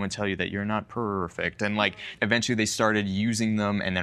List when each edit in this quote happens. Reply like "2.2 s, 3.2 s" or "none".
2.1 s